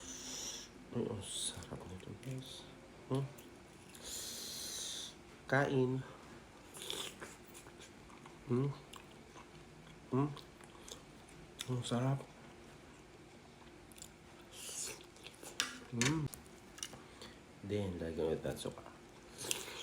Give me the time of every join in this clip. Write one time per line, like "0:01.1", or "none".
0:16.3